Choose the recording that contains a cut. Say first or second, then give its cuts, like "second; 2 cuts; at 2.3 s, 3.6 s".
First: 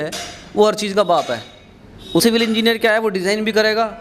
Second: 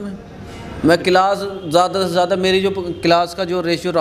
first; 1 cut; at 2.2 s